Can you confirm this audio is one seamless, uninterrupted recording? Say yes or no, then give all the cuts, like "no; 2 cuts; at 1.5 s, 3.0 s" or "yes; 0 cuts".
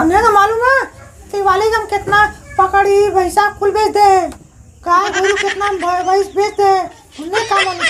yes; 0 cuts